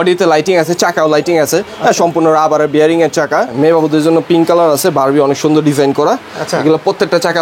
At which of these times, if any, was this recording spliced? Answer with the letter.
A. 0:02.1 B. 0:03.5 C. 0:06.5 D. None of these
B